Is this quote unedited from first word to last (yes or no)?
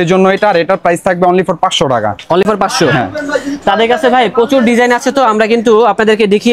yes